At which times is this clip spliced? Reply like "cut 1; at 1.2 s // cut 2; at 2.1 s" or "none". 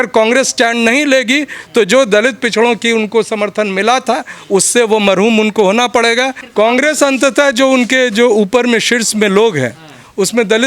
cut 1; at 6.4 s